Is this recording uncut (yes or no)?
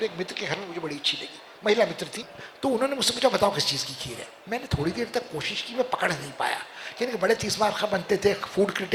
yes